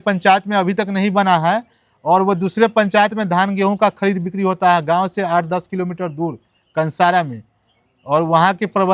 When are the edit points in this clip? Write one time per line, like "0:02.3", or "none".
none